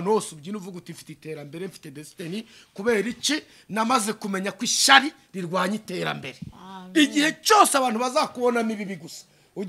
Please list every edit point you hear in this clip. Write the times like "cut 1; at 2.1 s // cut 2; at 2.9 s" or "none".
none